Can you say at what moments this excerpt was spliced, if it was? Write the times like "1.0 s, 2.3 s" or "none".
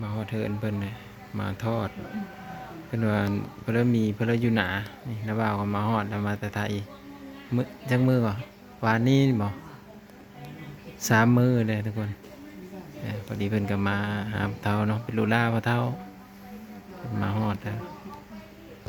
none

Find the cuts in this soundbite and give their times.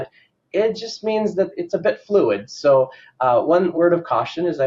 1.5 s, 3.7 s

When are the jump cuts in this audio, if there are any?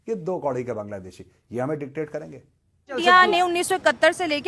3.0 s

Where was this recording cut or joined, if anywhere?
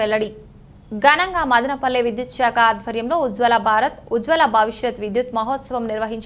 none

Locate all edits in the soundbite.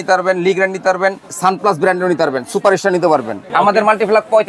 1.3 s, 3.4 s

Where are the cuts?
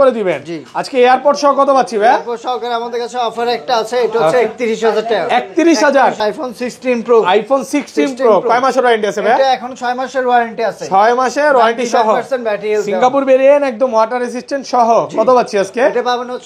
6.2 s

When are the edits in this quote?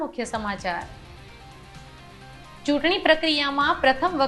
1.0 s, 2.7 s

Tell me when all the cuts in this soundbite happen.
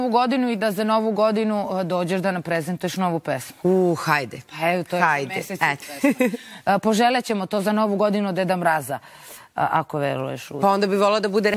none

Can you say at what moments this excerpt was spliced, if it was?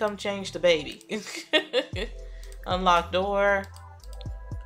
3.7 s

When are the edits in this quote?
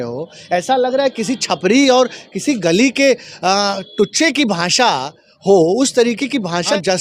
none

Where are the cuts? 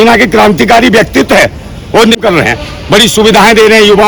2.2 s

